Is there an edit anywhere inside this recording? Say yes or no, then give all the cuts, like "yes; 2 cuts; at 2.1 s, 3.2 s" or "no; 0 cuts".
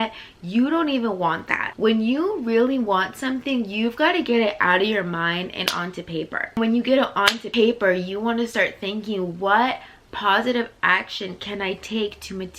yes; 3 cuts; at 1.6 s, 6.6 s, 7.4 s